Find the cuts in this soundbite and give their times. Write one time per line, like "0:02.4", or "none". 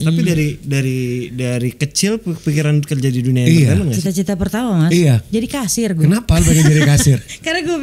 0:04.0
0:06.0